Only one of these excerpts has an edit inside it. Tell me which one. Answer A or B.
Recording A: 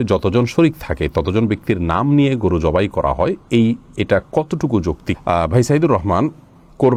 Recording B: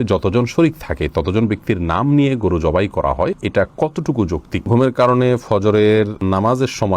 B